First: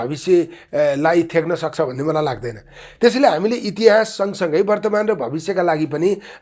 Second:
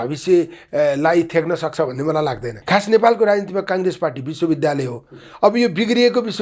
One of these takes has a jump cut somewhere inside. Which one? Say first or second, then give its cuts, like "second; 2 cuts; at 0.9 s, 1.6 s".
second; 1 cut; at 2.5 s